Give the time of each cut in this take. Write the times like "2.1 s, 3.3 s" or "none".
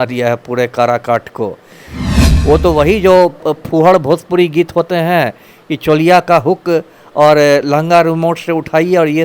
2.1 s